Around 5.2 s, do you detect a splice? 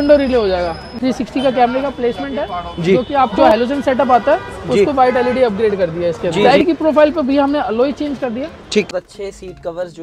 no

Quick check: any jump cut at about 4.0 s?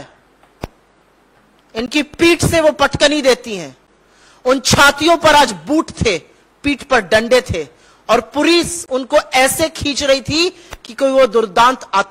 no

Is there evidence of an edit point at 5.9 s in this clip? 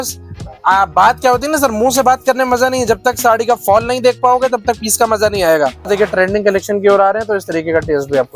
yes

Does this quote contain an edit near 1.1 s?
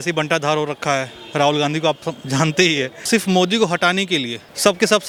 no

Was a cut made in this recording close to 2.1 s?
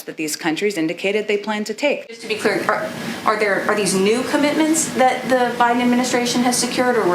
yes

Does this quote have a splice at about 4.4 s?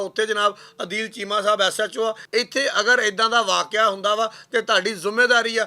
no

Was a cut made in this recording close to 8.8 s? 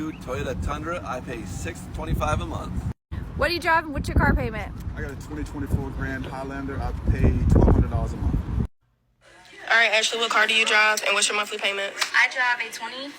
yes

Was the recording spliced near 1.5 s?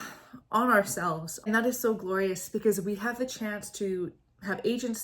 yes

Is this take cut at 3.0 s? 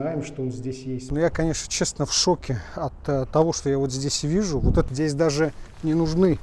no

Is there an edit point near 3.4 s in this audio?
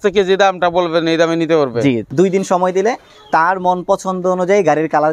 no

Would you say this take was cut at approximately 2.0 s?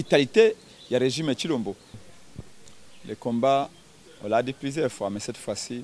yes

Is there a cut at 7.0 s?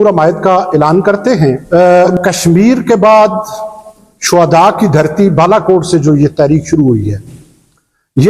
no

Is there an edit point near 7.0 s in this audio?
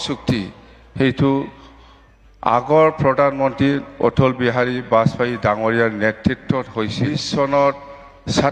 yes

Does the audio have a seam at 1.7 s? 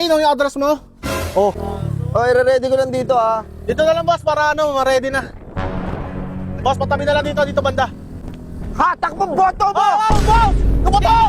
yes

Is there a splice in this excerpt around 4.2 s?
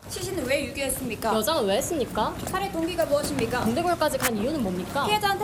no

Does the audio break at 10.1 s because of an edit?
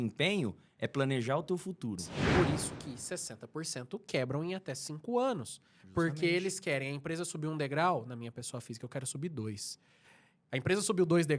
no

